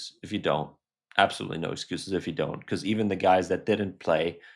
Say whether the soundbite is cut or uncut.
uncut